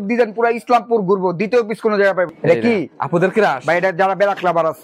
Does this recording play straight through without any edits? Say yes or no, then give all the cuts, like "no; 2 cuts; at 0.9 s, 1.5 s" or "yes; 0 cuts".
no; 1 cut; at 2.3 s